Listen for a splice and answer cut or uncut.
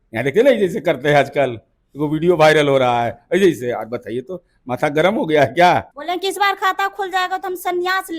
cut